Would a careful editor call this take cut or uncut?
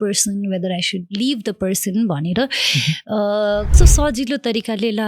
cut